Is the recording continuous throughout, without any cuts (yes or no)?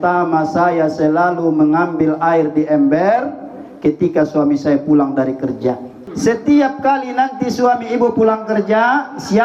no